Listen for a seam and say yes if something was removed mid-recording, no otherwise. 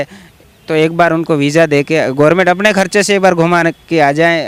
no